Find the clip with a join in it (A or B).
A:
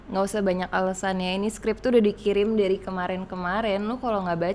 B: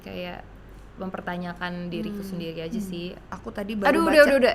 B